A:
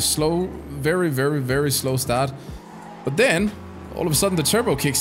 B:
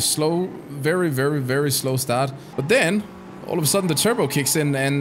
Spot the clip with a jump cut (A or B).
B